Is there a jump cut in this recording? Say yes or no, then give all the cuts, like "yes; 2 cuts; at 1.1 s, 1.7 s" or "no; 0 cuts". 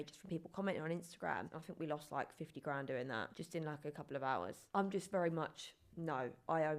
yes; 2 cuts; at 1.5 s, 4.6 s